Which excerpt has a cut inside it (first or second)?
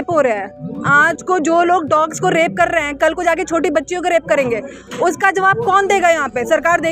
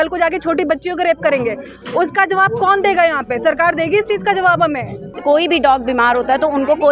second